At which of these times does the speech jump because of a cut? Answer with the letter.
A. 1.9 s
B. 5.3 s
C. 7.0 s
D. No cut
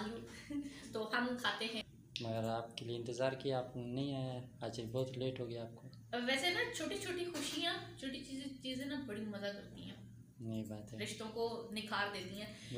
A